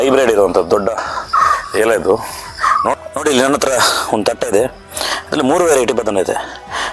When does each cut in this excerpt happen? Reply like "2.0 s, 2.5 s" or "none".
3.0 s